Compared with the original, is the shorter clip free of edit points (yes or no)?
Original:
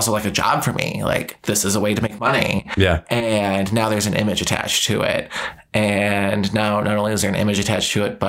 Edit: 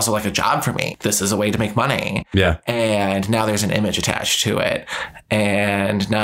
no